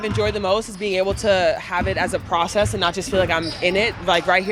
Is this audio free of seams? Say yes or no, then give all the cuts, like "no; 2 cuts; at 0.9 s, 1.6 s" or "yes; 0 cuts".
yes; 0 cuts